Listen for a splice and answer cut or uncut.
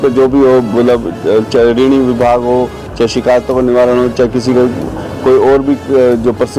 uncut